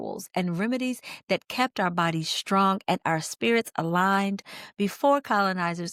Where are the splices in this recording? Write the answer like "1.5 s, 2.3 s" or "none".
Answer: none